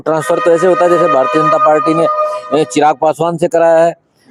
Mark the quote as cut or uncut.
uncut